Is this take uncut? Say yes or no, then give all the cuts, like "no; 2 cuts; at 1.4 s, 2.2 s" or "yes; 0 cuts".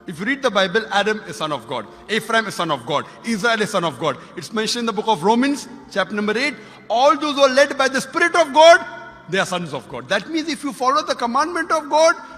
yes; 0 cuts